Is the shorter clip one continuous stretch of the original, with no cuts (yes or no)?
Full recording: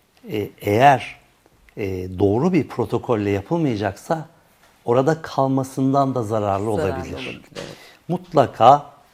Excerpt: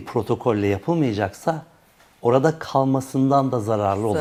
yes